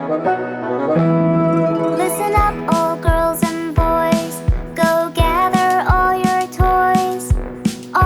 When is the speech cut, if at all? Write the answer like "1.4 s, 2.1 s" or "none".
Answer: none